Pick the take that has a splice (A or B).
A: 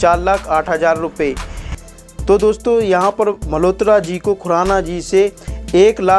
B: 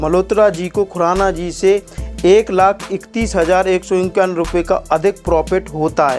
A